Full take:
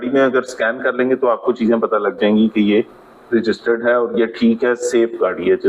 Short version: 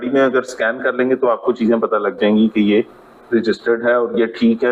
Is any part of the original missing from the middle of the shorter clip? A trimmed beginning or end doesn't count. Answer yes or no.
no